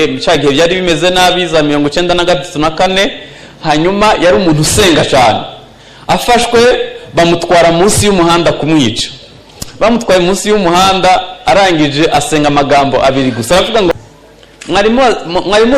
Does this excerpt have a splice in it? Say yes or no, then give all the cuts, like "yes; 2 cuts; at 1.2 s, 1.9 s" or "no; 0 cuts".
yes; 1 cut; at 13.9 s